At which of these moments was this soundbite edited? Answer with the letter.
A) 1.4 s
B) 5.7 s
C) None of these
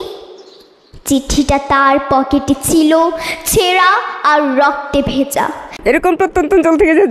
B